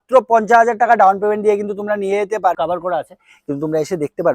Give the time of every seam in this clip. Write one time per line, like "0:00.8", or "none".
0:02.6